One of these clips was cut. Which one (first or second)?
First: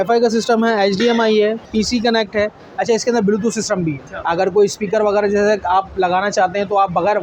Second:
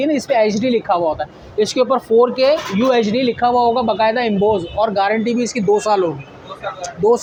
first